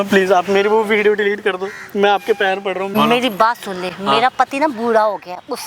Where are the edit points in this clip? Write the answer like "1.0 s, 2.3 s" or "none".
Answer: 2.9 s